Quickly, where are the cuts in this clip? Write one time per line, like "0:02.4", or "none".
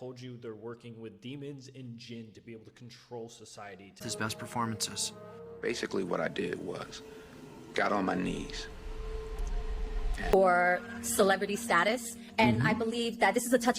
0:04.0
0:10.3